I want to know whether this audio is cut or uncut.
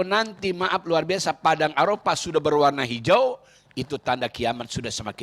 uncut